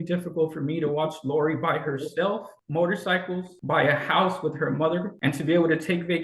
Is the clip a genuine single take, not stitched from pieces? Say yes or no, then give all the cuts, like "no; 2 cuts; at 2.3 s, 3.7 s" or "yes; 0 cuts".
no; 3 cuts; at 2.6 s, 3.5 s, 5.1 s